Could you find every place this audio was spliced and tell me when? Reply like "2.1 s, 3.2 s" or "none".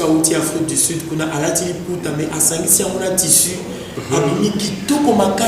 none

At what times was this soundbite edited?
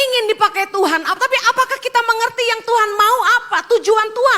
none

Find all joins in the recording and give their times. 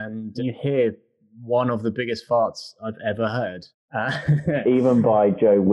4.6 s

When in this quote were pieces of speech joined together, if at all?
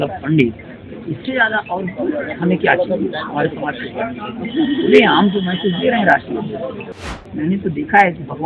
7.0 s

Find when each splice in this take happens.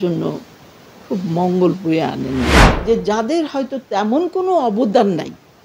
2.7 s

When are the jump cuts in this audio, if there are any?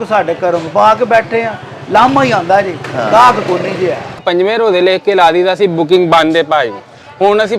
4.2 s

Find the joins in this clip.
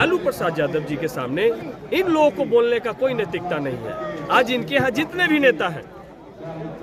none

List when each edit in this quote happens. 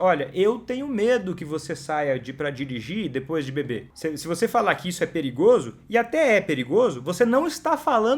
3.9 s

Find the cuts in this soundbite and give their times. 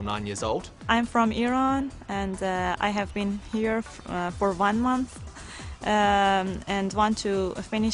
none

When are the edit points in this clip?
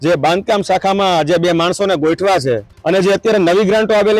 2.7 s

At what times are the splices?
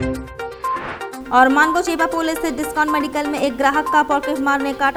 none

